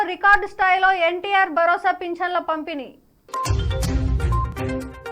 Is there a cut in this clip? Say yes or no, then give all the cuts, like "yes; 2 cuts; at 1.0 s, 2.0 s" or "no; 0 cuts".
no; 0 cuts